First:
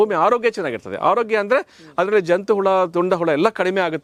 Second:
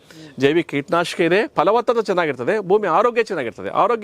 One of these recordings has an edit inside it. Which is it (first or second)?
second